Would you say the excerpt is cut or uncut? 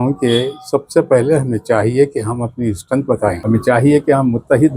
cut